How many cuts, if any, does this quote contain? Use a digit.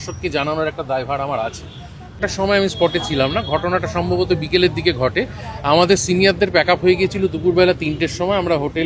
1